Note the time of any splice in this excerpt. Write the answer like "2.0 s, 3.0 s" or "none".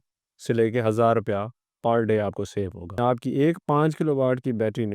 3.0 s